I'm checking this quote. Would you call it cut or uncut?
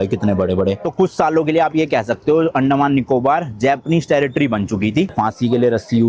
cut